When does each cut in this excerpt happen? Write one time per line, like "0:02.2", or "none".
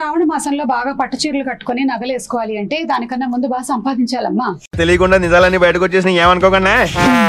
none